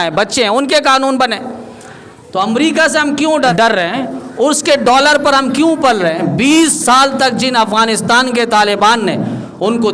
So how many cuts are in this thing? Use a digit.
1